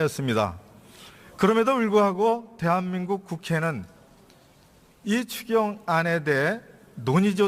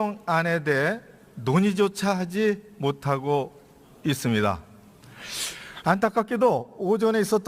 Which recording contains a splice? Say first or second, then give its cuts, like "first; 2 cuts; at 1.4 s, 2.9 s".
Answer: second; 1 cut; at 4.7 s